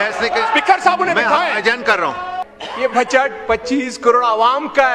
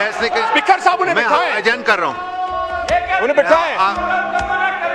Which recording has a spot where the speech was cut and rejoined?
first; 1 cut; at 2.4 s

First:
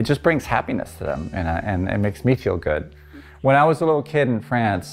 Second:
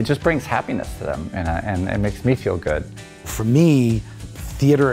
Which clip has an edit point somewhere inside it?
second; 1 cut; at 3.3 s

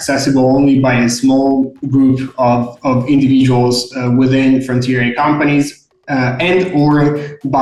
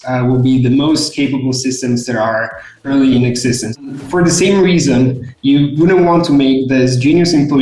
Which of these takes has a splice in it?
second; 1 cut; at 3.7 s

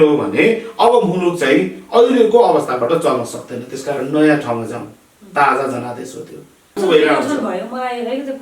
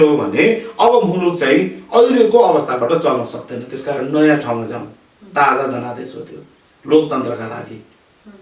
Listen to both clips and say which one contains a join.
first; 1 cut; at 6.8 s

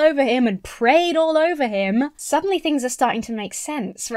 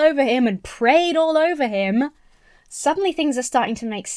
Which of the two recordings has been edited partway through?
first; 1 cut; at 2.2 s

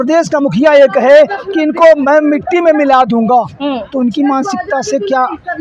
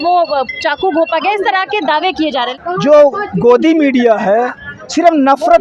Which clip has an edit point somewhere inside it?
second; 1 cut; at 2.5 s

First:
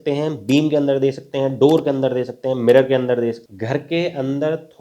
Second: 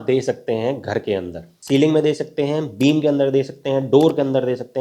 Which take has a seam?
first; 1 cut; at 3.4 s

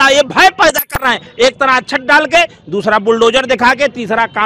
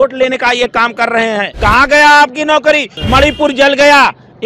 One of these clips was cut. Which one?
second; 2 cuts; at 1.5 s, 2.9 s

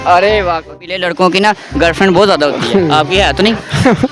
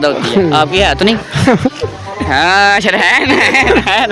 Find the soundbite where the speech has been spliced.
first; 1 cut; at 1.1 s

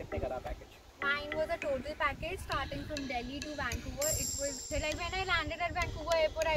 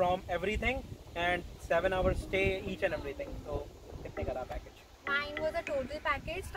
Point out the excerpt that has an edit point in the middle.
first; 1 cut; at 4.7 s

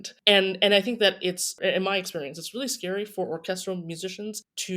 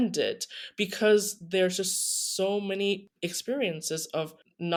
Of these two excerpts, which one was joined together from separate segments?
first; 1 cut; at 1.5 s

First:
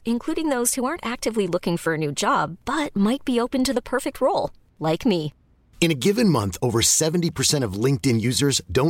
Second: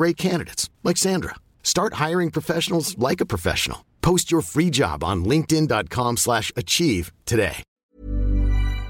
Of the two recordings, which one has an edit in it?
second; 1 cut; at 7.8 s

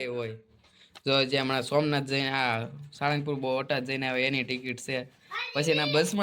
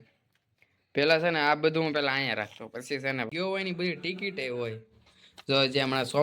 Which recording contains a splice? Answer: second; 1 cut; at 3.3 s

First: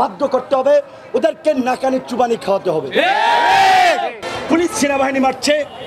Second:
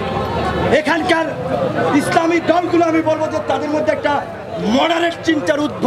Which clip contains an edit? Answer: first; 1 cut; at 4.2 s

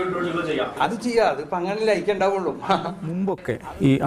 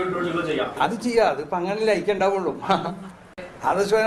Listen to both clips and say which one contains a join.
first; 1 cut; at 3.1 s

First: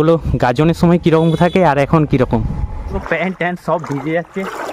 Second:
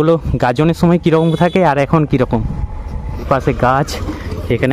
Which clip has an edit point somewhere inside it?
first; 1 cut; at 3.0 s

